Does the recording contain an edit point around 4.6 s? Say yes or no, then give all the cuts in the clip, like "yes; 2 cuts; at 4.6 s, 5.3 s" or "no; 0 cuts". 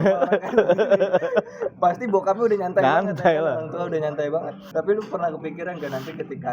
yes; 1 cut; at 4.6 s